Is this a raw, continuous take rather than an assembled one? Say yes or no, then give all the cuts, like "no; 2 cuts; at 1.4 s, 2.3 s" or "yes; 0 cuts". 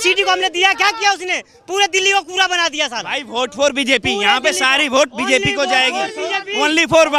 yes; 0 cuts